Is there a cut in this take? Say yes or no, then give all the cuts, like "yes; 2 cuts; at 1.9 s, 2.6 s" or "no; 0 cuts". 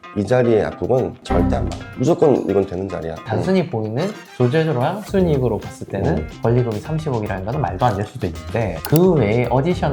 yes; 2 cuts; at 3.1 s, 8.8 s